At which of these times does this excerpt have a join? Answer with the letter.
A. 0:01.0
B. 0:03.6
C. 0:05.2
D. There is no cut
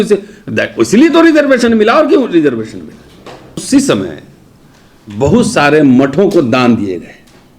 B